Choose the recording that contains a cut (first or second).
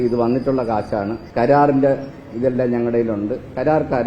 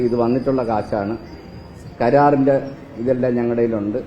first